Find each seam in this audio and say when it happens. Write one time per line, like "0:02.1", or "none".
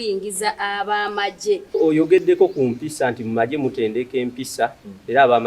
0:01.8